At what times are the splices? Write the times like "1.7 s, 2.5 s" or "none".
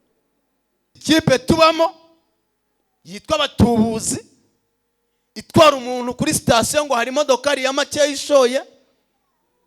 1.0 s